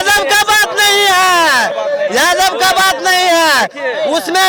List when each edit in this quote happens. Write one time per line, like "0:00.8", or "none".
none